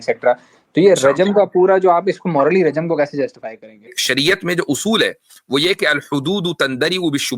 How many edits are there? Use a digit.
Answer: 1